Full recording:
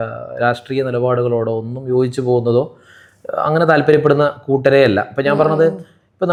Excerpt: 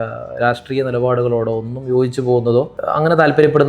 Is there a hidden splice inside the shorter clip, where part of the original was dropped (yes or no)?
yes